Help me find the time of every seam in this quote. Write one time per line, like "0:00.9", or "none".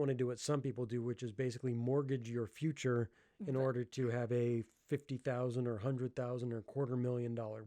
none